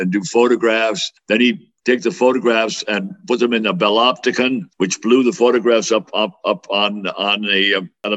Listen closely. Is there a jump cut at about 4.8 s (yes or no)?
no